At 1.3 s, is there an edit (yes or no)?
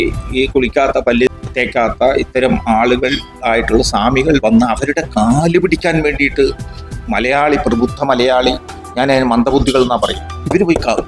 yes